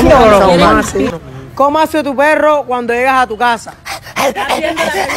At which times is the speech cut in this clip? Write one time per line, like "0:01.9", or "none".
0:01.1